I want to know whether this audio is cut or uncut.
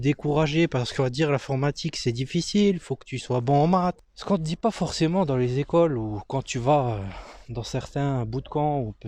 cut